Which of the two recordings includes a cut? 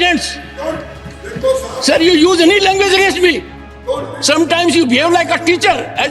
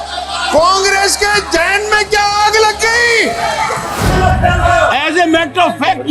second; 1 cut; at 4.0 s

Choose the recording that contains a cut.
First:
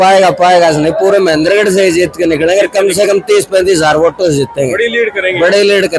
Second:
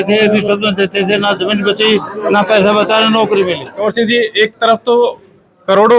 second; 1 cut; at 3.7 s

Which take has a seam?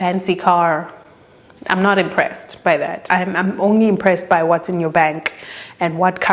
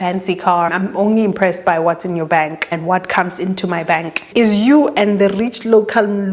second; 3 cuts; at 0.7 s, 2.7 s, 4.2 s

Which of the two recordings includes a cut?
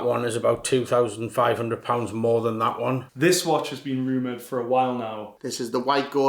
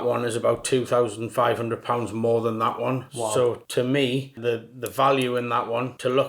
first; 2 cuts; at 3.1 s, 5.3 s

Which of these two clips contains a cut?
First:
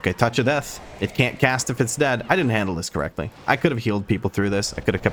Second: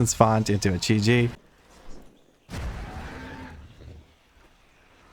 second; 1 cut; at 1.3 s

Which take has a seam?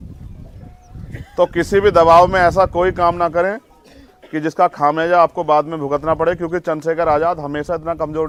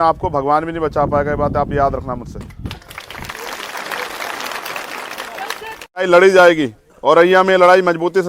second; 1 cut; at 6.0 s

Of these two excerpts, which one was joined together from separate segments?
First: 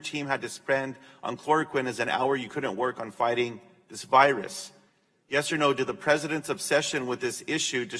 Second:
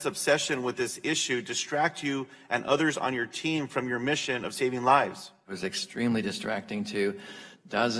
second; 1 cut; at 5.5 s

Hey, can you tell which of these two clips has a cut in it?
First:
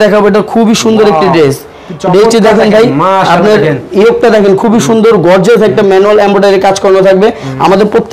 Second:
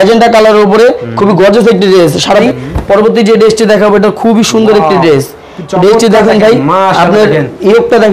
second; 1 cut; at 2.4 s

